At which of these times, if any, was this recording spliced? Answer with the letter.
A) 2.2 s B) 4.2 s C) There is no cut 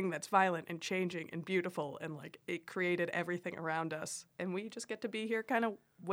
B